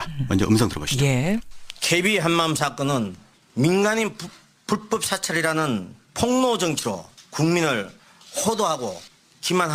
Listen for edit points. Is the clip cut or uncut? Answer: uncut